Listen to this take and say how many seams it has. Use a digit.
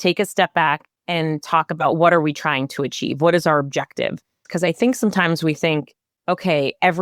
2